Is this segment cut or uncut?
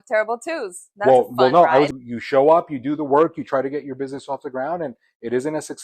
cut